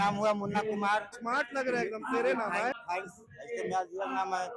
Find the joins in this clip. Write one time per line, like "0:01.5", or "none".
0:01.1
0:02.8